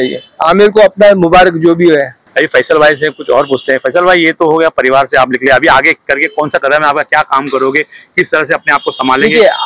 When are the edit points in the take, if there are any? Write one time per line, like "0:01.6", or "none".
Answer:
none

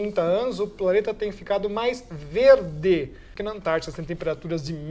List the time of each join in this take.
0:03.3

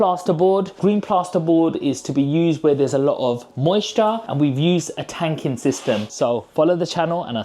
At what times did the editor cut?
0:06.1

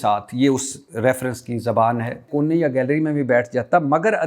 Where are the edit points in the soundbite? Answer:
0:02.2

